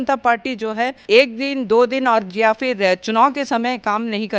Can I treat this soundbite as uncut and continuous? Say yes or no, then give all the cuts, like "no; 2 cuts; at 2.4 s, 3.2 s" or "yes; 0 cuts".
no; 1 cut; at 1.0 s